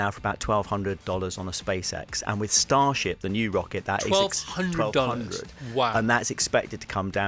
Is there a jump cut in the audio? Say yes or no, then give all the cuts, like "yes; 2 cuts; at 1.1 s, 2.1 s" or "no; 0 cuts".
no; 0 cuts